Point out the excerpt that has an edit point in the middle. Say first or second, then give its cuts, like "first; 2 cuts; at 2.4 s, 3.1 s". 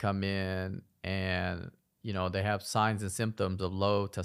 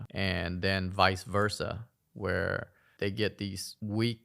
second; 1 cut; at 2.8 s